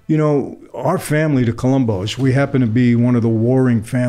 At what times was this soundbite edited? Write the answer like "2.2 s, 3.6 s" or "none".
none